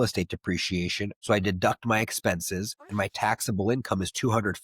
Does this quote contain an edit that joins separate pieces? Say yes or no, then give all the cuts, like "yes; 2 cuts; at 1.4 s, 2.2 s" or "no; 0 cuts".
yes; 1 cut; at 1.1 s